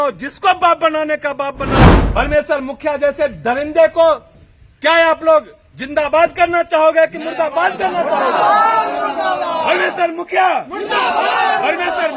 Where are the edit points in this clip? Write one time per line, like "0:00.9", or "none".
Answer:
0:02.0